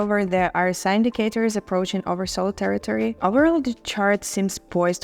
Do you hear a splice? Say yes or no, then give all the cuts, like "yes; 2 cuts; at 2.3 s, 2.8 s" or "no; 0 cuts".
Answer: yes; 1 cut; at 3.2 s